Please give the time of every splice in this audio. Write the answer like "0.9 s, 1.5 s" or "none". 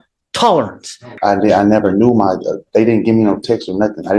1.1 s

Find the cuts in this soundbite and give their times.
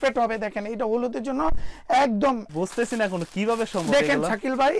2.5 s

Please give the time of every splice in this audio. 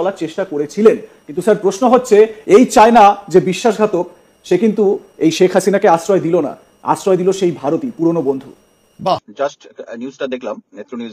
9.3 s

